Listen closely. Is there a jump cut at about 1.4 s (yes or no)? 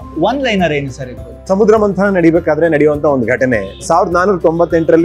yes